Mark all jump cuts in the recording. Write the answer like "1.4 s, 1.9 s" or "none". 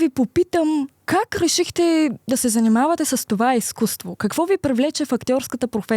1.0 s